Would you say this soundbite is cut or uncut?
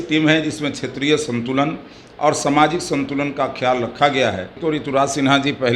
cut